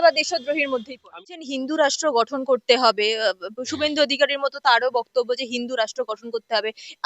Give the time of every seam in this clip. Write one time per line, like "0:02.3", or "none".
0:01.2